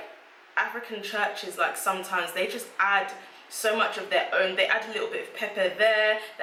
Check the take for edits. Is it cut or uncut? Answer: uncut